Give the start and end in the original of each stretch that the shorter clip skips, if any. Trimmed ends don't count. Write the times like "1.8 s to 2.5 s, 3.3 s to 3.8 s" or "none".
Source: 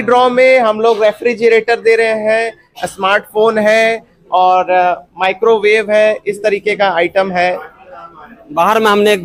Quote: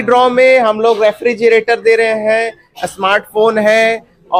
none